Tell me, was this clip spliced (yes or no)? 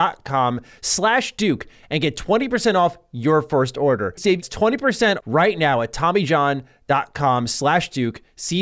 no